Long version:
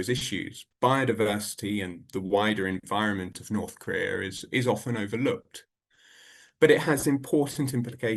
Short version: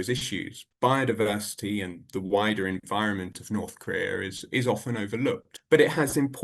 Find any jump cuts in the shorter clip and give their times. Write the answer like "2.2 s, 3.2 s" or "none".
5.5 s